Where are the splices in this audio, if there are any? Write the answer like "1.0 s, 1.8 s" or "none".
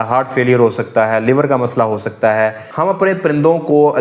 2.7 s